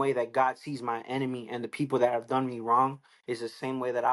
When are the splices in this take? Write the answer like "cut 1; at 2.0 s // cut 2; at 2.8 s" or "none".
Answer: none